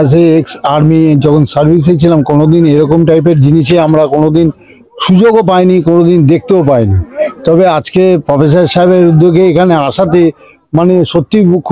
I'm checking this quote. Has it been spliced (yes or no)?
no